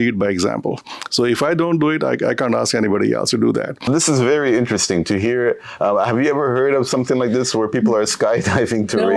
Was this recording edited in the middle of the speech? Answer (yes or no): yes